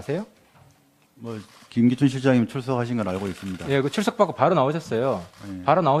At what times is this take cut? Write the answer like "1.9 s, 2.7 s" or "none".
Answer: 3.3 s